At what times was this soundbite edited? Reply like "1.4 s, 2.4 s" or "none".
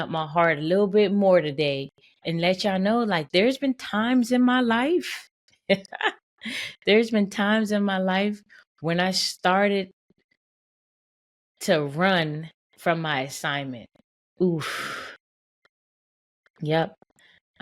2.2 s, 3.2 s